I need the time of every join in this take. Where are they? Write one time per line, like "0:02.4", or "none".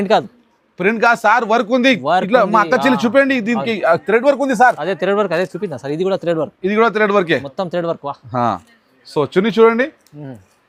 none